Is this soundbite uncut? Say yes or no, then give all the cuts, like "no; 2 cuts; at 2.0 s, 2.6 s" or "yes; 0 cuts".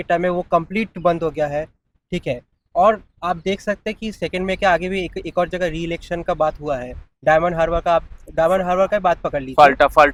yes; 0 cuts